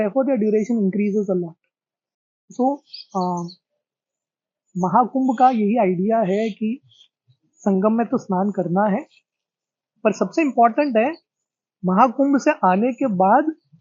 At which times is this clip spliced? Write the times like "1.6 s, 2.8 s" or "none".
2.3 s